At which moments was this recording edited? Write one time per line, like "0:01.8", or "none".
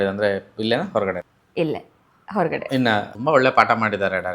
0:01.3
0:03.1